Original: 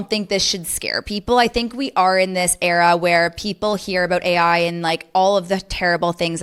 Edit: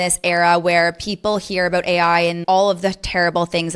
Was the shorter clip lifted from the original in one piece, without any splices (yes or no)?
no